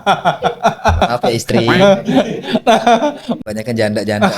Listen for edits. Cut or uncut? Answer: cut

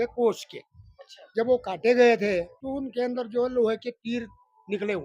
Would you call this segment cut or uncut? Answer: cut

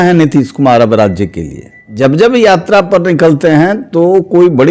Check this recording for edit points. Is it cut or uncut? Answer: cut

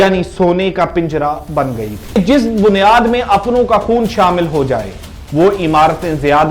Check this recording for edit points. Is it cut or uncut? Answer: cut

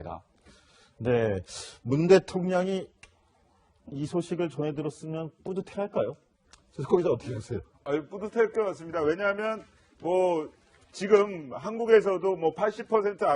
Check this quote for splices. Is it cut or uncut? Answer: cut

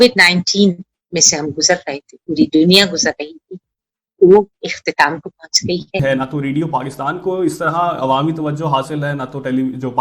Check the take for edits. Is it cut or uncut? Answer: cut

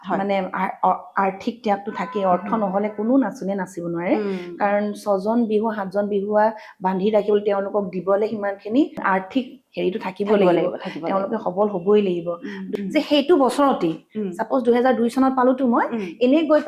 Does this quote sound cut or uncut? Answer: cut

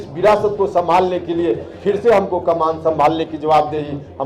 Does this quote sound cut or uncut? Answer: uncut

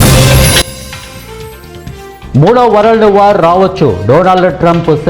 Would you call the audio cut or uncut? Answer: cut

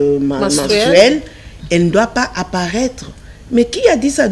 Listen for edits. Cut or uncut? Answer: uncut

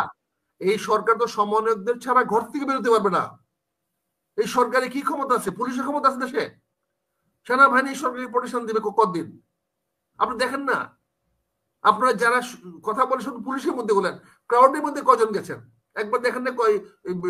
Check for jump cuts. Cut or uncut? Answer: uncut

